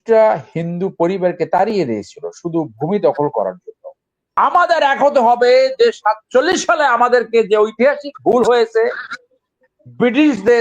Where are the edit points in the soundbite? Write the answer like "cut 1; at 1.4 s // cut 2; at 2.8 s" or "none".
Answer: cut 1; at 4.2 s